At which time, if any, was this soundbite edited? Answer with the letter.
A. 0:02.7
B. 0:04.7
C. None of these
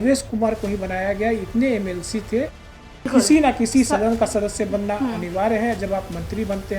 A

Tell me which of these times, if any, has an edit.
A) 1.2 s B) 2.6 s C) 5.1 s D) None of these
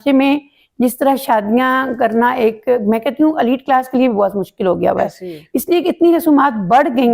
D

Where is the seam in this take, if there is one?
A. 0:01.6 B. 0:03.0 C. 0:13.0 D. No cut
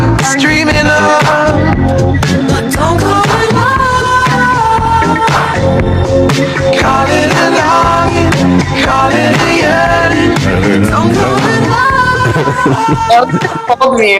A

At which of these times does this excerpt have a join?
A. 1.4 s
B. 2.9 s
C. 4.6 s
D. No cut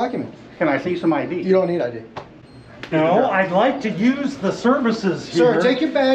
B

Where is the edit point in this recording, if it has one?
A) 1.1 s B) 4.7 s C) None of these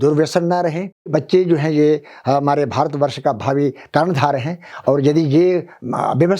A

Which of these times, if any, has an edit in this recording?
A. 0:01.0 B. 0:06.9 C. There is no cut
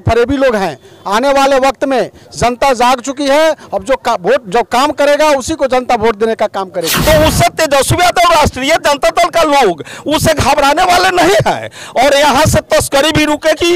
B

